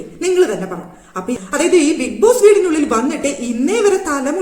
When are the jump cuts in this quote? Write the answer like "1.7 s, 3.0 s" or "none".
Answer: 1.3 s

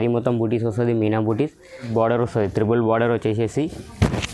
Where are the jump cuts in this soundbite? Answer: 1.9 s

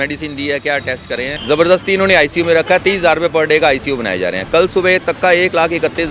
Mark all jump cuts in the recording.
1.3 s

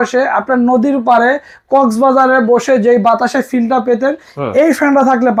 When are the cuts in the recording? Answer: none

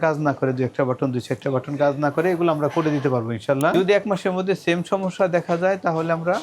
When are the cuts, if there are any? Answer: 3.7 s

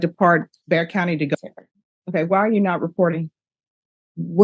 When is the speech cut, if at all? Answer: 1.3 s

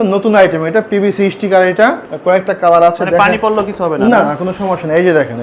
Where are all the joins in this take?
2.1 s

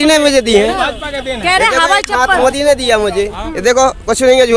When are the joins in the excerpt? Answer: none

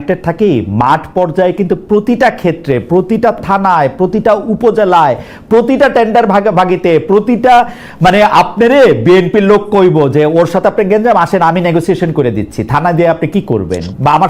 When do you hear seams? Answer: none

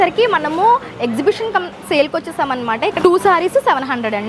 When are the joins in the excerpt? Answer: 3.0 s

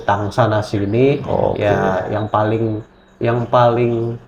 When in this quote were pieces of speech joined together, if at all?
none

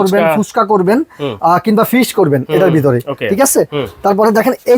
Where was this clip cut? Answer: none

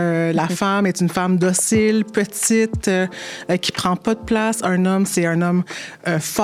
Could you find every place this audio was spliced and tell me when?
none

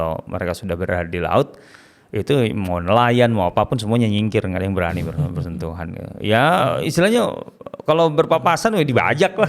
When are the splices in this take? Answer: none

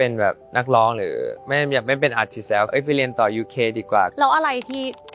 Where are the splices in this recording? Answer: 2.7 s, 4.1 s

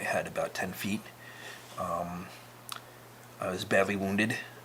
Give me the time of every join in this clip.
none

